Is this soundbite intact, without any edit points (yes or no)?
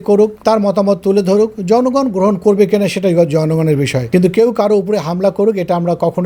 yes